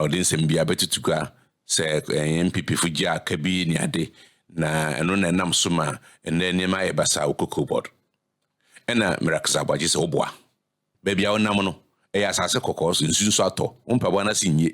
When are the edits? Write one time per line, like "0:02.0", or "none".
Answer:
0:10.8